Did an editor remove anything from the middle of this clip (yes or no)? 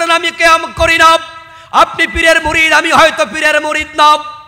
no